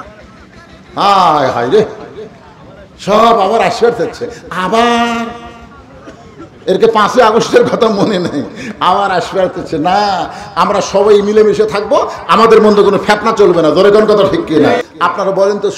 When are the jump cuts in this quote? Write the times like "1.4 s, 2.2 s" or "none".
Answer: 14.9 s